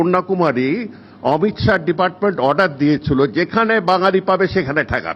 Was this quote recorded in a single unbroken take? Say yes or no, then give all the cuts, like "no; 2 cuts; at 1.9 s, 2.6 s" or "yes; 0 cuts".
yes; 0 cuts